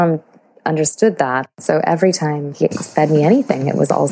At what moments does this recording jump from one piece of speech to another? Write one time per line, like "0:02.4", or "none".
0:01.5